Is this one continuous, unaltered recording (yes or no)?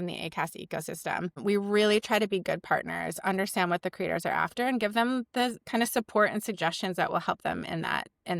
no